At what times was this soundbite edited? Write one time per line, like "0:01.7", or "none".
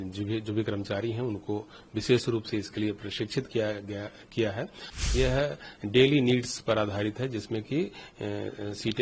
0:05.0